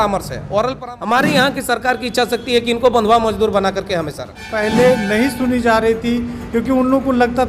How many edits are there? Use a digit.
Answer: 2